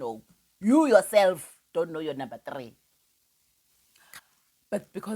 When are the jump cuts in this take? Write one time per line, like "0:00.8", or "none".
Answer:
0:04.2